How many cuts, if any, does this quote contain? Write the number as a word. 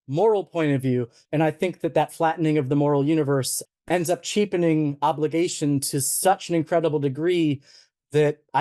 two